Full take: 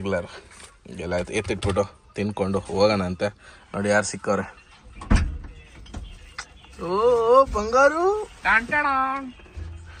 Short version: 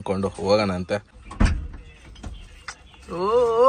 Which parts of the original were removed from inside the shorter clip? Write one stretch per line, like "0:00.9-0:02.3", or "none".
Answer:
0:03.5-0:04.9